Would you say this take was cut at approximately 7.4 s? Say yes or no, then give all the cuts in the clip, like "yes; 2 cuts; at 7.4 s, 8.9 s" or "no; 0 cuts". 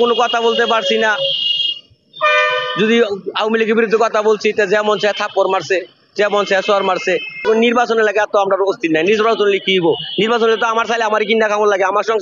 yes; 1 cut; at 7.4 s